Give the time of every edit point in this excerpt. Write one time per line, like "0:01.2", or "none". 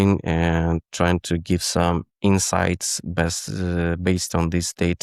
none